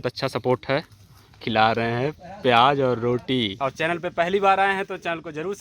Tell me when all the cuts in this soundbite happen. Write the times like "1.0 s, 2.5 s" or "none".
1.4 s, 3.6 s